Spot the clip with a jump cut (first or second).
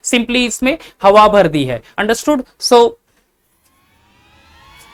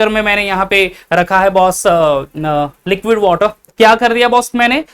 second